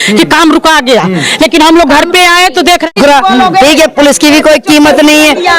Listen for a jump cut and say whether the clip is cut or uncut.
cut